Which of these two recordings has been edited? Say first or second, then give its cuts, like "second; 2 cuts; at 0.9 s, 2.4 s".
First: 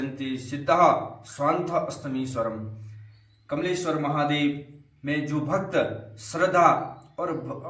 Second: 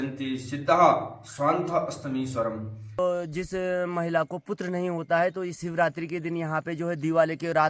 second; 1 cut; at 2.8 s